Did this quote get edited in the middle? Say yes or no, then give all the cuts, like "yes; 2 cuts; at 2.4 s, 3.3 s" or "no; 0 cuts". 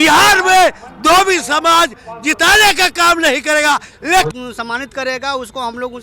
yes; 1 cut; at 4.3 s